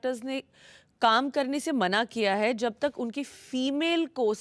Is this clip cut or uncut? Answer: uncut